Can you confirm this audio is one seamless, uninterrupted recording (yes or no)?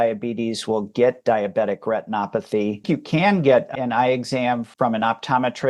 no